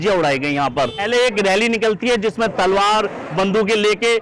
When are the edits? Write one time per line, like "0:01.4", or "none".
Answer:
0:01.0